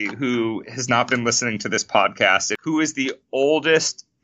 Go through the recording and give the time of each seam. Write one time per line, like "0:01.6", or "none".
0:02.5